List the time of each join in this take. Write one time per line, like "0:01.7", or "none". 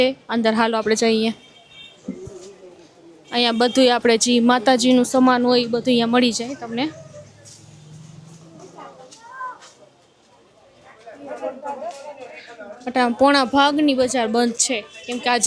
none